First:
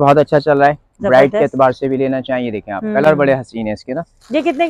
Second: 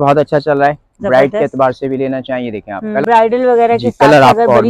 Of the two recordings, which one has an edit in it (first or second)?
second